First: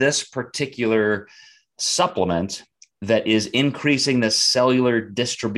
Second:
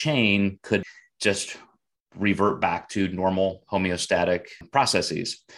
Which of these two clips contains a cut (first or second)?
second